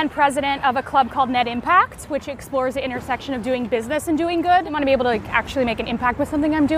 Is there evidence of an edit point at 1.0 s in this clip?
no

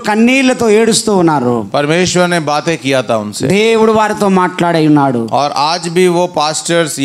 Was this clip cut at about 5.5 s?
no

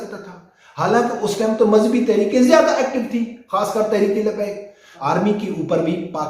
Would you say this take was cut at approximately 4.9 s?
yes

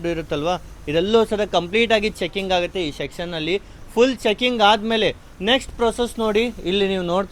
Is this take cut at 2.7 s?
no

